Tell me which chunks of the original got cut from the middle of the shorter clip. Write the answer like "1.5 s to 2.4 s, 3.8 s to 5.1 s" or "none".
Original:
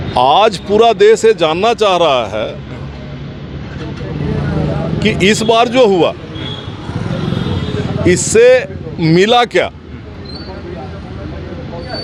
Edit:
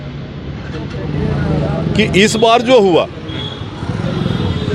none